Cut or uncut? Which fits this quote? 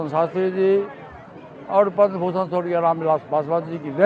uncut